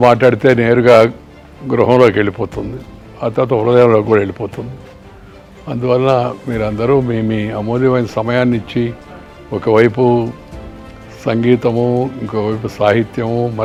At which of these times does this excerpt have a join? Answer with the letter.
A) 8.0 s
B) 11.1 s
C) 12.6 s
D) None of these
D